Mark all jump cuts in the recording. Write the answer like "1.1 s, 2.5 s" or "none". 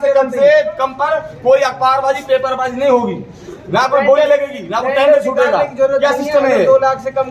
none